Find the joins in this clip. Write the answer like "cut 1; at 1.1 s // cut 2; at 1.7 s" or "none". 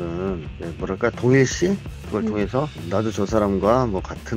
cut 1; at 2.8 s